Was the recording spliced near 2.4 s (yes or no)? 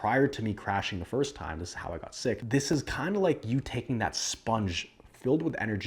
yes